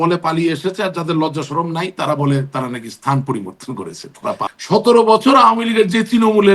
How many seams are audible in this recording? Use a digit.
1